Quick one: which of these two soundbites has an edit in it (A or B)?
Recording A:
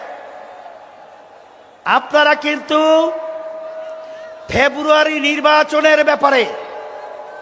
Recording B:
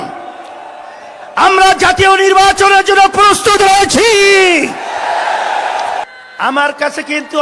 B